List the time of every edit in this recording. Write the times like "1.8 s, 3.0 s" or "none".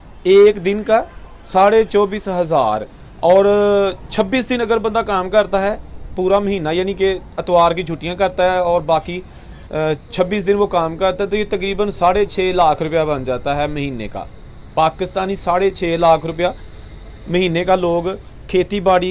none